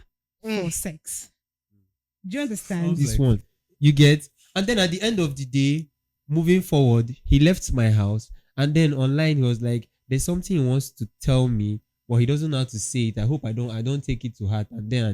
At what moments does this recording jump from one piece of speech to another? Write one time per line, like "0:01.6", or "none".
0:03.1

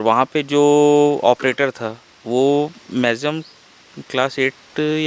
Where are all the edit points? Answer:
none

